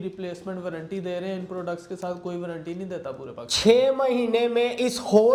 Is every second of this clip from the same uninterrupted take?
yes; 0 cuts

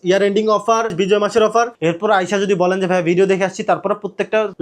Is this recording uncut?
no; 2 cuts; at 0.9 s, 1.7 s

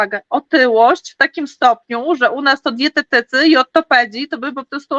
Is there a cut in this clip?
no; 0 cuts

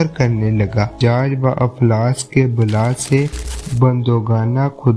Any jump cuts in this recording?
yes; 1 cut; at 1.0 s

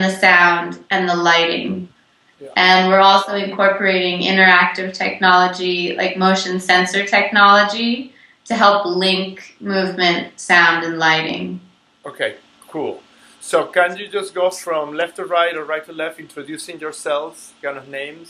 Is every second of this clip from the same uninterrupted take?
no; 1 cut; at 1.0 s

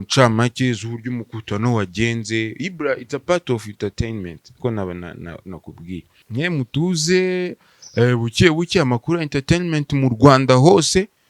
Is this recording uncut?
no; 1 cut; at 6.2 s

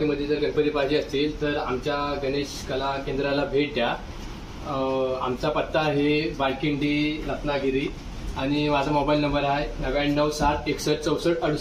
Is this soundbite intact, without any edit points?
yes; 0 cuts

